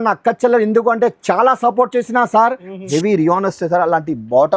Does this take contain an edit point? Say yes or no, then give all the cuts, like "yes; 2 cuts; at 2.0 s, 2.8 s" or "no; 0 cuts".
yes; 1 cut; at 2.9 s